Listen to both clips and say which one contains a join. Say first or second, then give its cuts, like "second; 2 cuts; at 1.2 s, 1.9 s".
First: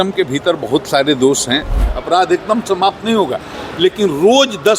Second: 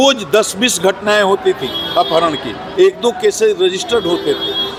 first; 1 cut; at 1.9 s